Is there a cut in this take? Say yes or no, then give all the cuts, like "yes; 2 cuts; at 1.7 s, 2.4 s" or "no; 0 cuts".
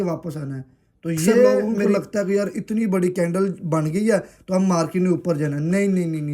yes; 1 cut; at 1.7 s